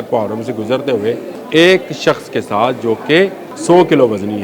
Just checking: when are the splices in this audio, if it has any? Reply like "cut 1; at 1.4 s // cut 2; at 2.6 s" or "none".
cut 1; at 1.3 s // cut 2; at 3.5 s